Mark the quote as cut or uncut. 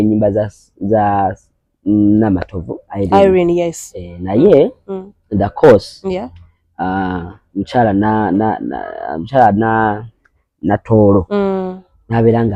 uncut